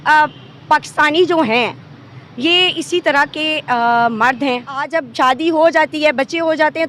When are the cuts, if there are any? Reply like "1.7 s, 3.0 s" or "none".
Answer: 5.0 s